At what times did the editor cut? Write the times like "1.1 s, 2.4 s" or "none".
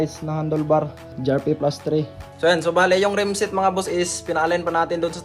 1.1 s, 2.2 s